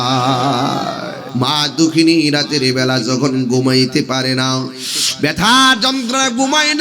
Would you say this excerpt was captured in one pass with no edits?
no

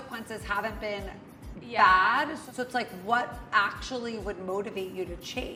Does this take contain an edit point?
no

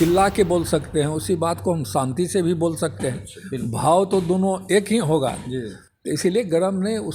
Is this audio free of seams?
yes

